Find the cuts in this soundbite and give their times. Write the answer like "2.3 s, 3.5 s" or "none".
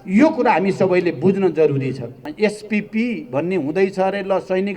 2.3 s